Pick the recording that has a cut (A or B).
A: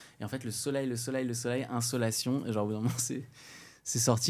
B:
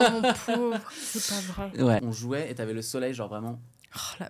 B